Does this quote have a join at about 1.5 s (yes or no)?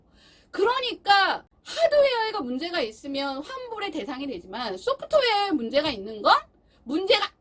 yes